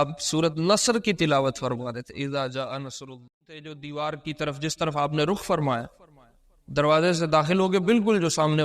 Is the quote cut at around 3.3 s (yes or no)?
yes